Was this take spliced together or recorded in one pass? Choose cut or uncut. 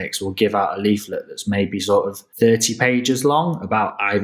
cut